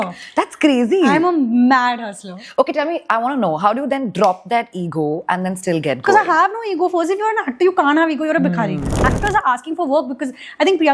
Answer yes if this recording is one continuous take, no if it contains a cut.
no